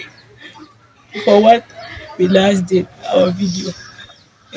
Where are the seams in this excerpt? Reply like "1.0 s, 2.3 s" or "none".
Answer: none